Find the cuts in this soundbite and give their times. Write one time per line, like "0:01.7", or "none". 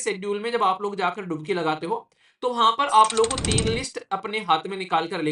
none